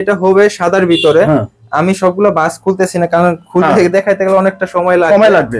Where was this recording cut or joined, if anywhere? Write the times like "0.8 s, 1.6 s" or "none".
none